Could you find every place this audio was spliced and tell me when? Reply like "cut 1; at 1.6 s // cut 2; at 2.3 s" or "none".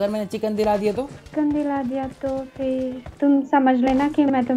cut 1; at 1.2 s // cut 2; at 3.1 s